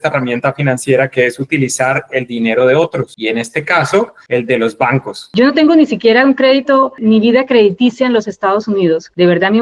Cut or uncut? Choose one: cut